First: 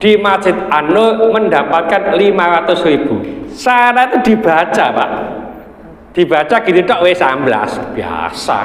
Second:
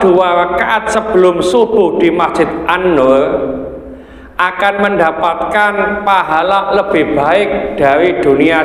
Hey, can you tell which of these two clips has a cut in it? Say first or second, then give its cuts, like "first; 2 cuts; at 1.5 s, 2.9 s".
first; 1 cut; at 3.4 s